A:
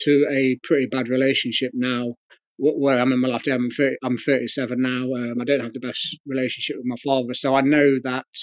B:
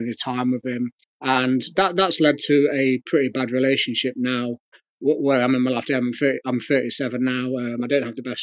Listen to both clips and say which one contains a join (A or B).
B